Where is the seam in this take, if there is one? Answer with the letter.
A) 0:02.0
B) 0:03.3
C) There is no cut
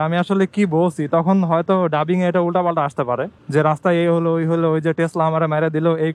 B